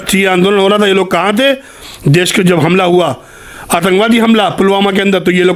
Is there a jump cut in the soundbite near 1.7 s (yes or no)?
no